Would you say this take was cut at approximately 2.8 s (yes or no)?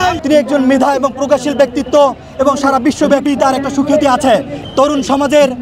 no